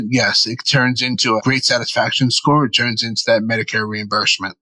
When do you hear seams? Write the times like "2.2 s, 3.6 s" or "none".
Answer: 1.4 s